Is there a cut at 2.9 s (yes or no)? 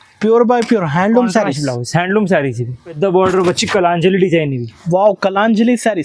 yes